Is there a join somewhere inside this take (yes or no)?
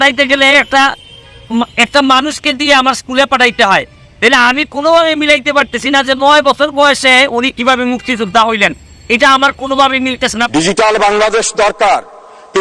yes